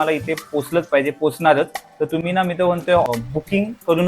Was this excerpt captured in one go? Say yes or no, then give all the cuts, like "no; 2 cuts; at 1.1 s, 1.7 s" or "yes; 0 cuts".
no; 1 cut; at 3.1 s